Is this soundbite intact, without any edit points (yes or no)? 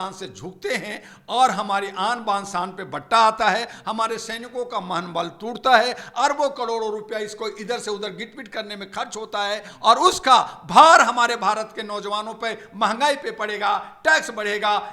yes